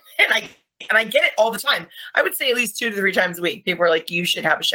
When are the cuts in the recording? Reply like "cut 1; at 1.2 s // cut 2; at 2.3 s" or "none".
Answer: none